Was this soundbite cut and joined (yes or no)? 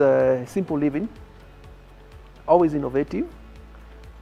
no